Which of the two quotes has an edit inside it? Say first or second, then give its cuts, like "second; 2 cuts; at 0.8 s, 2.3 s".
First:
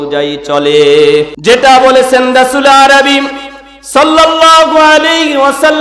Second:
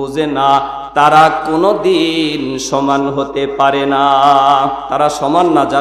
first; 1 cut; at 1.3 s